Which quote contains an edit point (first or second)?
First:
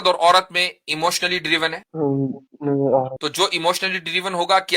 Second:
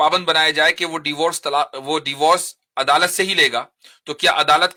first